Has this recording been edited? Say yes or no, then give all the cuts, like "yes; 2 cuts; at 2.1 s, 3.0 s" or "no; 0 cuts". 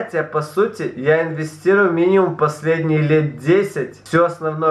no; 0 cuts